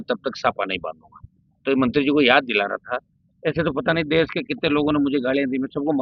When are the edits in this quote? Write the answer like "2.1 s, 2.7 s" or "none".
none